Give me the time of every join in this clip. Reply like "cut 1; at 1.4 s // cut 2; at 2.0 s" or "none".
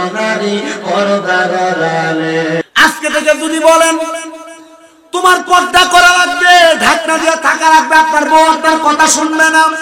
cut 1; at 2.6 s